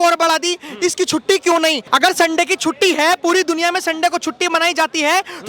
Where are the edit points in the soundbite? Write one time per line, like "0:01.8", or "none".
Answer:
0:01.8